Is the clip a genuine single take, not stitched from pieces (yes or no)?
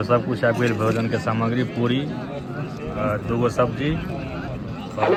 yes